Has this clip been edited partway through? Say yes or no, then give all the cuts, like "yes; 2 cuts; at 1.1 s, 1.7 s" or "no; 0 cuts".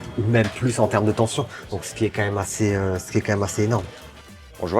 no; 0 cuts